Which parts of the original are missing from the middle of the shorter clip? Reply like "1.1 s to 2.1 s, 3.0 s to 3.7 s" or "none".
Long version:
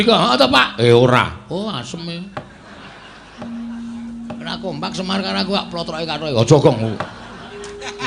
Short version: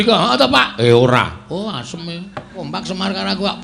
2.5 s to 4.6 s